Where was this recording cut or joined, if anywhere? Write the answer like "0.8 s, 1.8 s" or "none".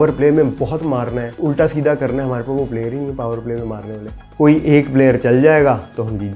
1.3 s, 4.3 s